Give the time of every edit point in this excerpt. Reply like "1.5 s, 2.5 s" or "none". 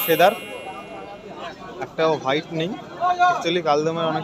none